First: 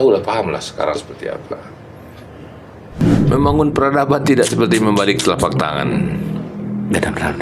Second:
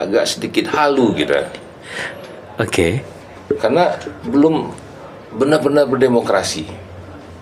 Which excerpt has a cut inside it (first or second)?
first